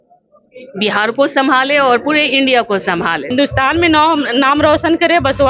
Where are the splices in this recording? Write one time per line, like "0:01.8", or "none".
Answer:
0:03.3